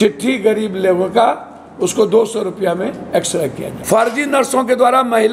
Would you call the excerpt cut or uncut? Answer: cut